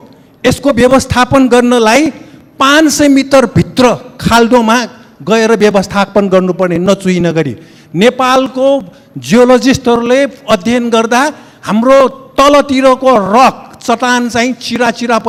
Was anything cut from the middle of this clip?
no; 0 cuts

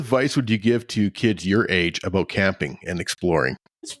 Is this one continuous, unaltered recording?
yes; 0 cuts

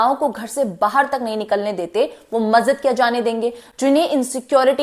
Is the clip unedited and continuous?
yes; 0 cuts

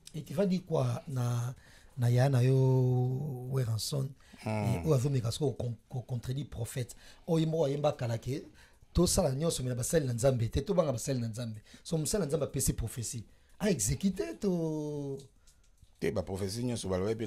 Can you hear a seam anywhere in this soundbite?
no; 0 cuts

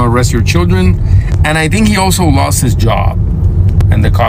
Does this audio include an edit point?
no; 0 cuts

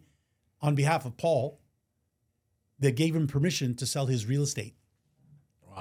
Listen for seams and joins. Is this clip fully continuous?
yes; 0 cuts

